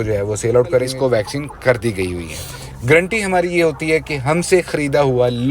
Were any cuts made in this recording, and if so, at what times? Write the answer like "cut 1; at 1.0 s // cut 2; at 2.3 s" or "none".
cut 1; at 0.9 s